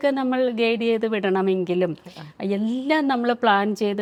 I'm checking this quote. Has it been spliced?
no; 0 cuts

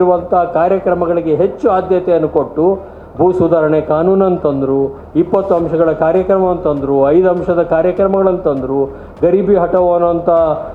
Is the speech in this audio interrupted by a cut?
no; 0 cuts

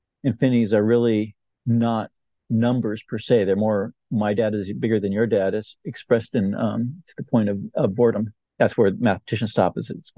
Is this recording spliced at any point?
yes; 1 cut; at 8.4 s

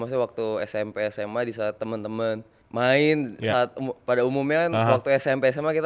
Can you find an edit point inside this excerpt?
yes; 1 cut; at 2.6 s

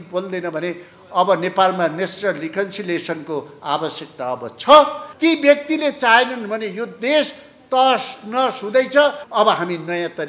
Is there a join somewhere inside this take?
yes; 2 cuts; at 5.0 s, 9.2 s

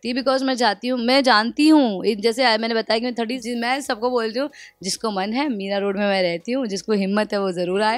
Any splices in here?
yes; 1 cut; at 3.4 s

